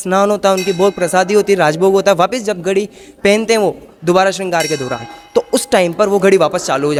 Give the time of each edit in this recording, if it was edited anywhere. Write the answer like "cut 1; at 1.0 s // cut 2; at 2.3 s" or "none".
none